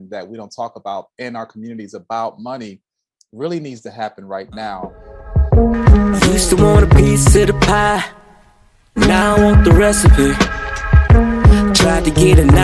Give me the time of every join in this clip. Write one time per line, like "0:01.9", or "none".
0:05.3